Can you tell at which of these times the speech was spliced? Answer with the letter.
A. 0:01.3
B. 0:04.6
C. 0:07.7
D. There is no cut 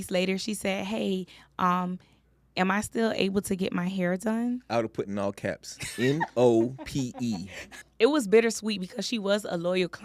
C